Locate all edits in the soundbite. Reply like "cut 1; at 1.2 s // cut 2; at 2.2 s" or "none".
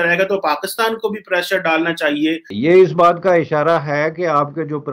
cut 1; at 2.5 s